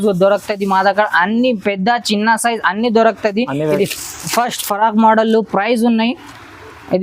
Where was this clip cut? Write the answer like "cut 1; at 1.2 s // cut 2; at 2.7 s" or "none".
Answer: cut 1; at 3.8 s